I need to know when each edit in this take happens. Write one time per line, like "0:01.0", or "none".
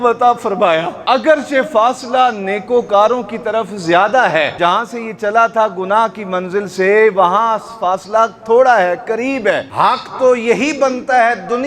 0:00.9
0:04.5
0:09.7